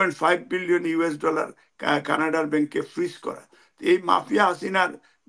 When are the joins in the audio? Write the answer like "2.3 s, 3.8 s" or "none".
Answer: none